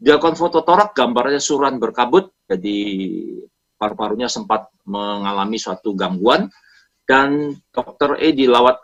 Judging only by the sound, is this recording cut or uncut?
uncut